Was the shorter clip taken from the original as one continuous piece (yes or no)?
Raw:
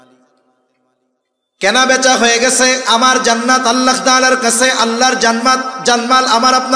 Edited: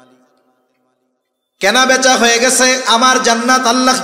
yes